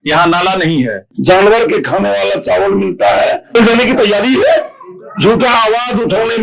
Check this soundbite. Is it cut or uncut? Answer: cut